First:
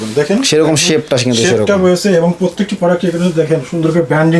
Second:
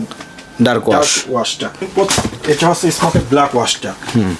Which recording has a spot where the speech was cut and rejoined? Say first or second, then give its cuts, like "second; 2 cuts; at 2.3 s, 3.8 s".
second; 1 cut; at 1.9 s